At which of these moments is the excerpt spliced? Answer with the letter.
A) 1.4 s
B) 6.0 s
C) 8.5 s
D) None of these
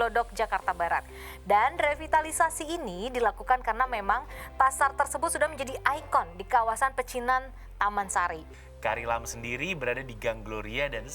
C